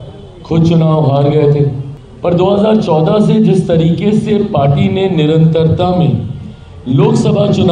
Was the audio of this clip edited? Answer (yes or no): yes